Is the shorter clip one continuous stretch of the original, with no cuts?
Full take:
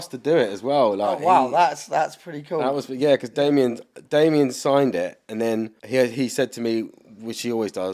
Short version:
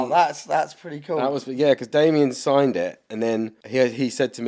no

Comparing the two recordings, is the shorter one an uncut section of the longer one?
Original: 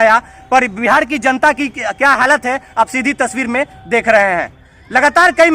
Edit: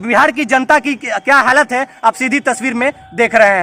yes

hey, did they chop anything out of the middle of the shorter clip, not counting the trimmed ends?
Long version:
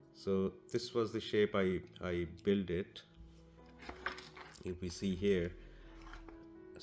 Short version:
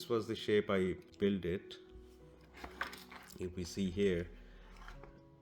yes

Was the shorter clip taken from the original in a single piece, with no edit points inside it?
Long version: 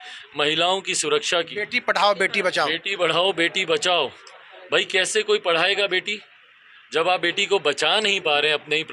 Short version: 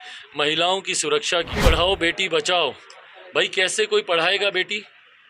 no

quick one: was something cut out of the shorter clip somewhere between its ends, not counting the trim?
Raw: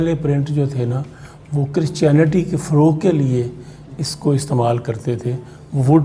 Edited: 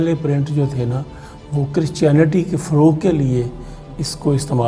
no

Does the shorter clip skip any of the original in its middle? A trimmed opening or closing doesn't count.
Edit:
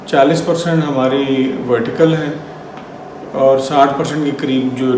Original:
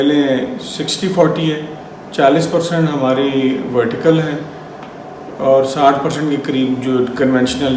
no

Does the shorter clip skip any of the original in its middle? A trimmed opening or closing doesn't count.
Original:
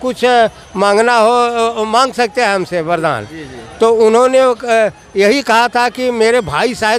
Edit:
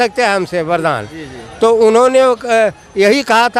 no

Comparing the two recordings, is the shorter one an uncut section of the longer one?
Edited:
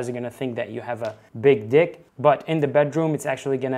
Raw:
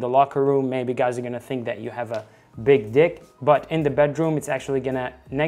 no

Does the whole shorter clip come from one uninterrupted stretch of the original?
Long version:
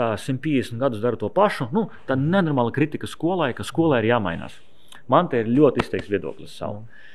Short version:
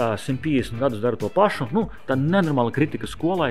yes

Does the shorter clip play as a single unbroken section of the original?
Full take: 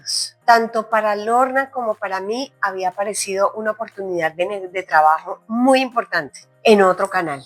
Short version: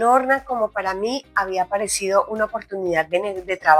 yes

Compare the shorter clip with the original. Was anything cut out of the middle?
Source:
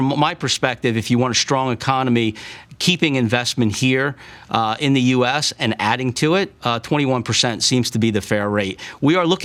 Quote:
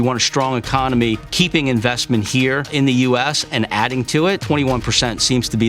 yes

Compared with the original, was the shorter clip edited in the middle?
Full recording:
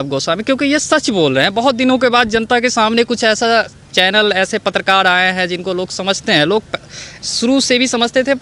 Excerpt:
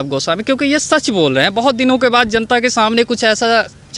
no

